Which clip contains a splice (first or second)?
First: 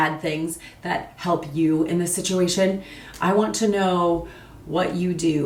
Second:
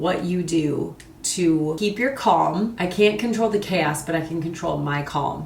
second